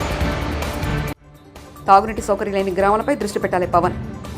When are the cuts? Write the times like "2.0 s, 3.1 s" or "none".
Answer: 1.0 s